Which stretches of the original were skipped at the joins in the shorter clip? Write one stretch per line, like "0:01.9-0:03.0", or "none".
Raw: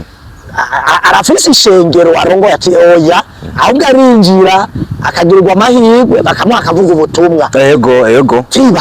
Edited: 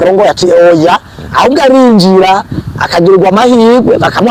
none